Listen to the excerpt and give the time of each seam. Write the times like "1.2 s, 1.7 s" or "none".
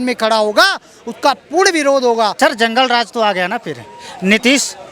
2.3 s